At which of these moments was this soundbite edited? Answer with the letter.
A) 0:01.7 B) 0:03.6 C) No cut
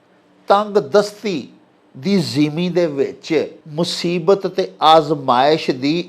B